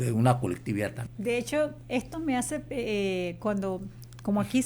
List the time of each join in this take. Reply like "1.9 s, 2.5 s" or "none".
1.0 s